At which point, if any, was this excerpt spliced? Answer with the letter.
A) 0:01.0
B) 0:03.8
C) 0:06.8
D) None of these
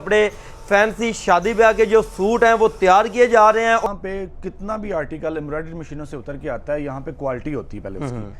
B